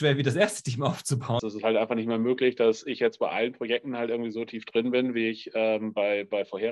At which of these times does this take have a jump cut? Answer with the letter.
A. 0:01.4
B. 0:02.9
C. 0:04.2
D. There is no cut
A